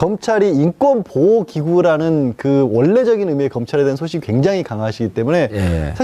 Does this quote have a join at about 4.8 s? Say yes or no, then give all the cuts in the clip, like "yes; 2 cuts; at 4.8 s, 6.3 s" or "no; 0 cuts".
yes; 1 cut; at 4.8 s